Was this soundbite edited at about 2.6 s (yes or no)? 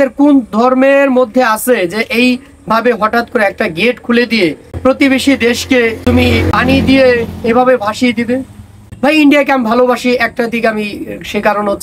no